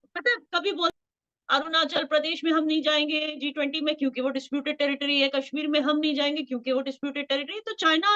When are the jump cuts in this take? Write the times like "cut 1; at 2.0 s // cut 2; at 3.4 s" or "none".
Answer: cut 1; at 1.0 s